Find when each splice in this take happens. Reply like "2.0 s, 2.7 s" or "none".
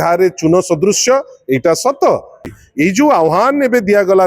2.4 s